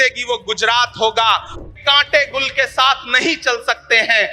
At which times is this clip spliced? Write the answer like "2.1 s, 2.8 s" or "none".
1.5 s